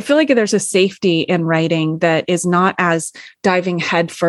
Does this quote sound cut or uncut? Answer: uncut